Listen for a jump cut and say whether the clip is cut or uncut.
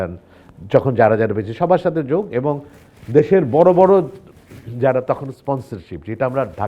uncut